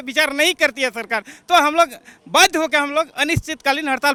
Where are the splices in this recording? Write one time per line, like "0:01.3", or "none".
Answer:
none